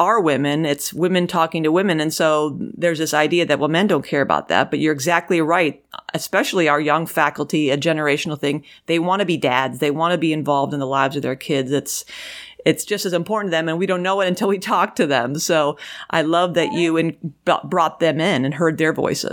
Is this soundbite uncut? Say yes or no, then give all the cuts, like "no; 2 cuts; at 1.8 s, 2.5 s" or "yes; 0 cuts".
yes; 0 cuts